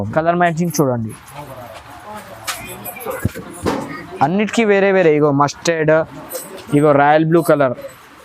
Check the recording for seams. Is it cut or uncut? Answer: uncut